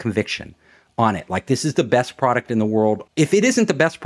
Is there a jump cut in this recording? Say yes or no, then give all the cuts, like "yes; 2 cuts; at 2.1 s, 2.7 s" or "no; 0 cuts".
yes; 1 cut; at 3.0 s